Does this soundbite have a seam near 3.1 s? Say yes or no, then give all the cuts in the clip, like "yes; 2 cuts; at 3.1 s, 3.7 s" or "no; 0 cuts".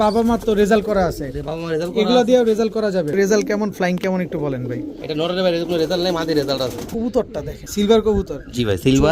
yes; 3 cuts; at 3.1 s, 6.8 s, 7.6 s